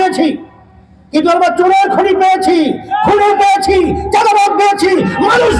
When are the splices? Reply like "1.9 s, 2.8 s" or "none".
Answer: none